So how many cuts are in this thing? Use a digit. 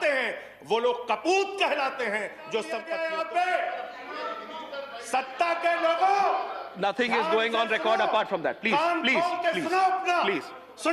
1